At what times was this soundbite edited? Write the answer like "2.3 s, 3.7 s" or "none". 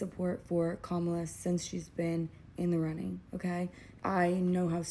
3.8 s